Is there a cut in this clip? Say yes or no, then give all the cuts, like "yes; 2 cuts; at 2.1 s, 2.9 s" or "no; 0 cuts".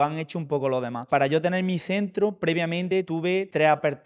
yes; 2 cuts; at 1.0 s, 3.2 s